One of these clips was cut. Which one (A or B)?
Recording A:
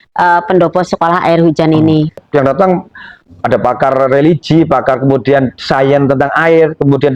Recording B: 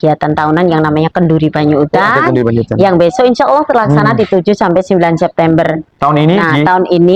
A